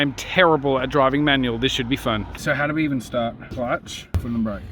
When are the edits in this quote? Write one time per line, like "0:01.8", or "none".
0:02.3
0:03.5